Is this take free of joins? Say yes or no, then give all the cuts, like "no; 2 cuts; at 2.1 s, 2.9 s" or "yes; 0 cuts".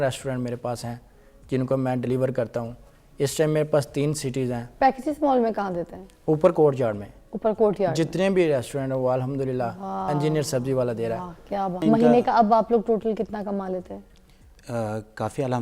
no; 1 cut; at 11.8 s